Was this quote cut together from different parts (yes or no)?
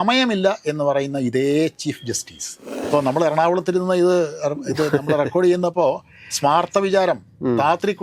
yes